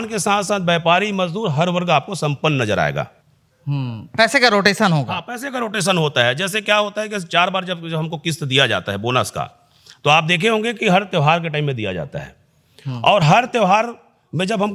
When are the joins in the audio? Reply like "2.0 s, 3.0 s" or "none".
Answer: none